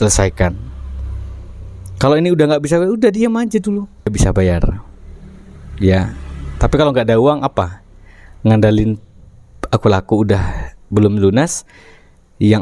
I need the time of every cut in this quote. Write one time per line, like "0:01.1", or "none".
0:04.1